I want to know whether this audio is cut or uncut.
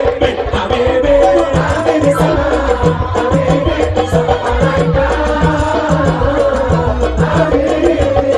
uncut